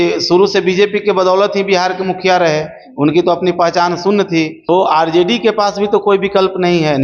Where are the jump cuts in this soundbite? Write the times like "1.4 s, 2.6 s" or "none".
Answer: 4.6 s